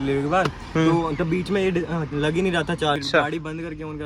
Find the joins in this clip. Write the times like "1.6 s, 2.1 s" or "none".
3.0 s